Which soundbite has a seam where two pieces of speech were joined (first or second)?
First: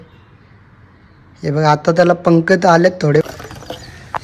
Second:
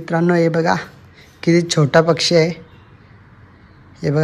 first